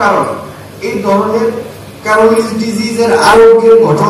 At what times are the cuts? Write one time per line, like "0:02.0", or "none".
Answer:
none